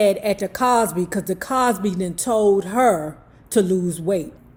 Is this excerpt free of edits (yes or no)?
yes